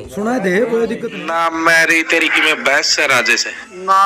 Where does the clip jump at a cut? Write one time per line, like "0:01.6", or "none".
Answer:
0:01.2